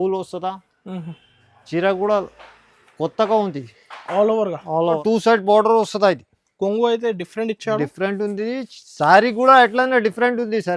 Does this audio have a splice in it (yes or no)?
yes